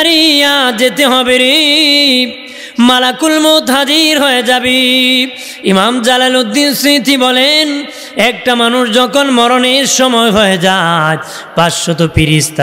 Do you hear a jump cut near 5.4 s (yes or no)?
no